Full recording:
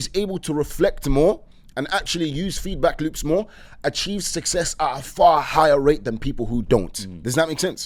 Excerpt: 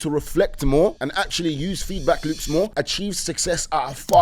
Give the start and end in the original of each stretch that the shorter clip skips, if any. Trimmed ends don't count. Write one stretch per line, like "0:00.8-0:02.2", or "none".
0:01.4-0:01.7
0:03.5-0:03.8